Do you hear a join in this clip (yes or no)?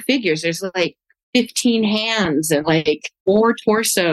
yes